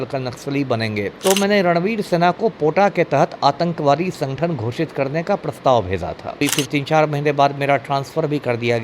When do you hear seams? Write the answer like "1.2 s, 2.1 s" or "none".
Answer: 1.1 s, 6.4 s